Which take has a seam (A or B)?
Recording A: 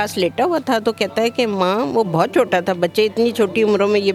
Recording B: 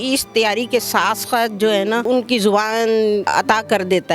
B